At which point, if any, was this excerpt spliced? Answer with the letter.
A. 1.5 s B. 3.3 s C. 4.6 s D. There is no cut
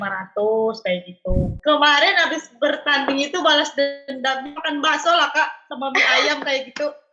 A